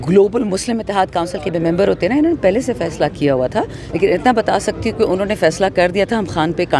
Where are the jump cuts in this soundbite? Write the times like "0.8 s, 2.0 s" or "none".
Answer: 3.8 s